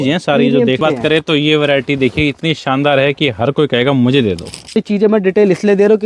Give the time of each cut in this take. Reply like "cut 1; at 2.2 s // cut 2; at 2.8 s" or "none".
cut 1; at 0.8 s // cut 2; at 4.8 s

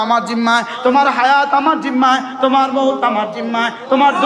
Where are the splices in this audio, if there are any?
none

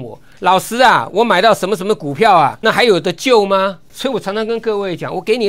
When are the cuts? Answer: cut 1; at 2.6 s // cut 2; at 3.9 s

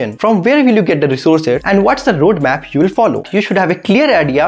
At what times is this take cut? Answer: cut 1; at 3.2 s

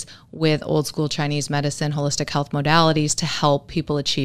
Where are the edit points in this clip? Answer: none

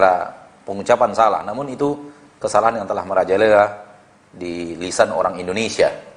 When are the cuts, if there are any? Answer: none

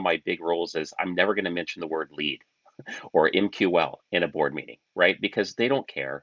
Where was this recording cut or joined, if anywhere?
none

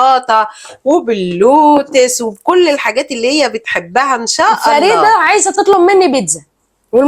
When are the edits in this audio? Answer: cut 1; at 4.7 s

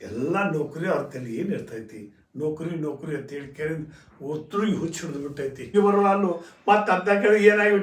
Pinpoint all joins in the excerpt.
cut 1; at 5.7 s

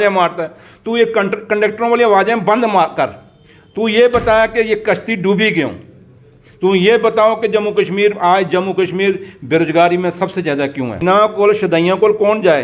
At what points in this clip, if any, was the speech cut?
cut 1; at 11.0 s

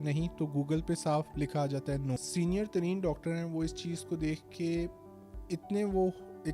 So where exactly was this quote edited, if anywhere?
cut 1; at 2.2 s

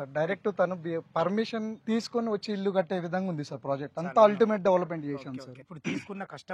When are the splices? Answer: cut 1; at 1.8 s // cut 2; at 5.6 s

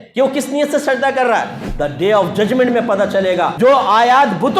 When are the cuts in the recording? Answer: cut 1; at 1.6 s // cut 2; at 3.5 s

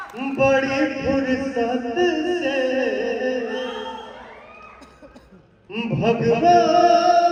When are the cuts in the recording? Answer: none

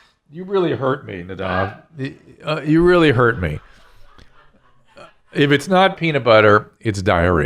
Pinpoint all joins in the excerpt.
cut 1; at 5.9 s

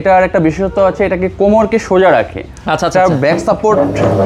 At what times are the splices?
none

